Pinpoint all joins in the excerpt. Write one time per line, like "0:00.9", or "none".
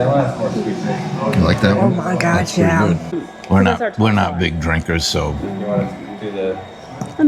0:03.2